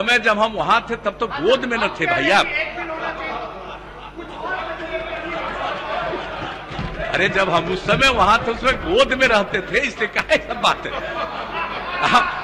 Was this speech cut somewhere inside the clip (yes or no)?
no